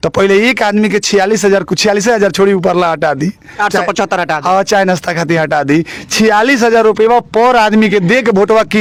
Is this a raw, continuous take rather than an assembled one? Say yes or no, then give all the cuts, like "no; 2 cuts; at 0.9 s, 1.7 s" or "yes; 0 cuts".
yes; 0 cuts